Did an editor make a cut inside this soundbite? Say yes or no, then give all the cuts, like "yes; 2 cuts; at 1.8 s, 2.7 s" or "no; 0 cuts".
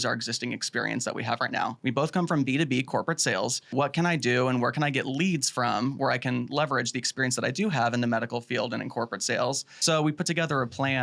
yes; 3 cuts; at 1.8 s, 3.7 s, 9.7 s